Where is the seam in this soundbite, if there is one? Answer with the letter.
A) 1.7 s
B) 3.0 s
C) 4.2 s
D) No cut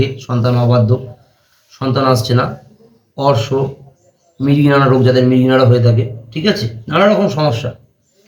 D